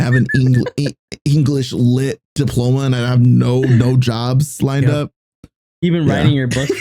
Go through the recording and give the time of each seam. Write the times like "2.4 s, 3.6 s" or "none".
2.2 s

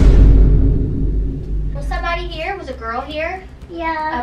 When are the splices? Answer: 1.8 s

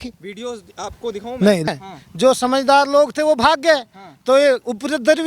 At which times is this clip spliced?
1.7 s

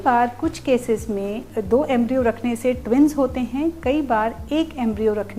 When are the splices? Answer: 1.5 s

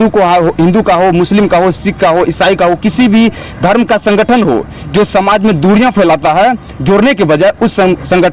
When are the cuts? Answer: none

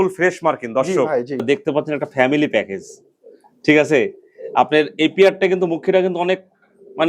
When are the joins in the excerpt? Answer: 1.4 s

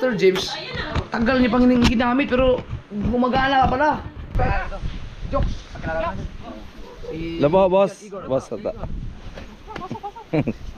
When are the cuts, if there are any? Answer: 4.2 s

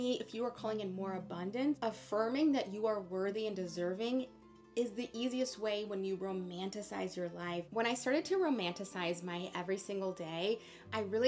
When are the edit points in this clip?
7.6 s

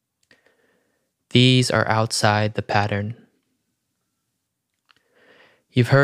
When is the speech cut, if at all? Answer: none

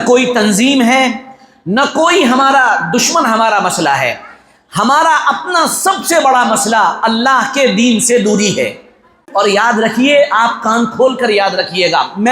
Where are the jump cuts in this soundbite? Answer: 9.2 s

